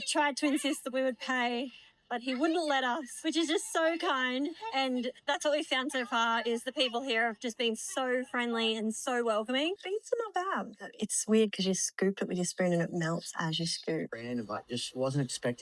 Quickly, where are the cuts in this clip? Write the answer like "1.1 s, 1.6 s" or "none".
9.8 s, 14.2 s